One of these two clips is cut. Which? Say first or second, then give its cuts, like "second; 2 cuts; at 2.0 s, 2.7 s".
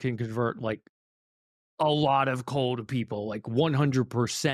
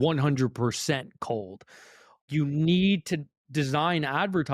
second; 1 cut; at 2.3 s